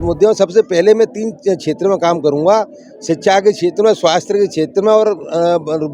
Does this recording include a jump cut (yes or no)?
no